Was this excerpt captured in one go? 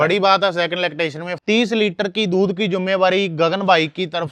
no; 1 cut; at 1.3 s

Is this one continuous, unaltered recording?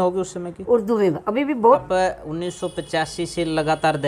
no; 1 cut; at 1.8 s

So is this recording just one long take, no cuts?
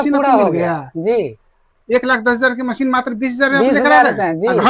yes; 0 cuts

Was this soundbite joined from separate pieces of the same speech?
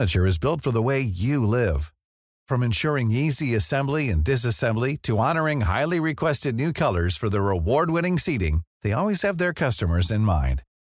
no; 0 cuts

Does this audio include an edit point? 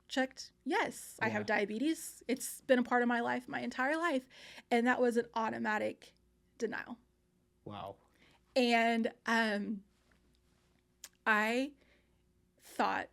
no; 0 cuts

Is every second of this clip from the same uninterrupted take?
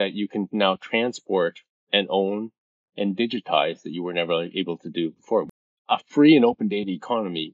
no; 1 cut; at 5.5 s

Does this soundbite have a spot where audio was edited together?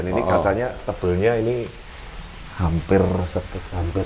no; 0 cuts

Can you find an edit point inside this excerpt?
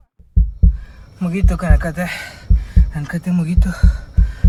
no; 0 cuts

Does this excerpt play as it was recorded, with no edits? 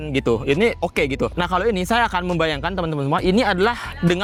yes; 0 cuts

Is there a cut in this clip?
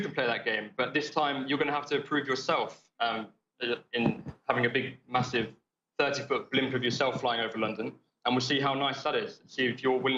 no; 0 cuts

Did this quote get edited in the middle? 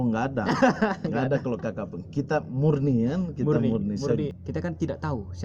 yes; 1 cut; at 4.3 s

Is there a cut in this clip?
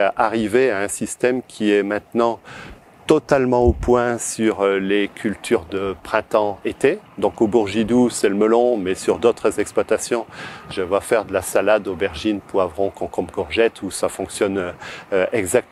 no; 0 cuts

